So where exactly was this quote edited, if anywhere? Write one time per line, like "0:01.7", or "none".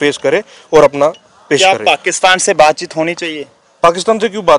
none